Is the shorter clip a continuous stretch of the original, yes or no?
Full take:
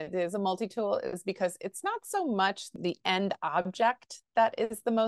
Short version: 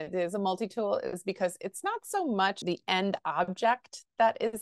no